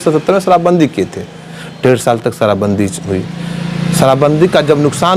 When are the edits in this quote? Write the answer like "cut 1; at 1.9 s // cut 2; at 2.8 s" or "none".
none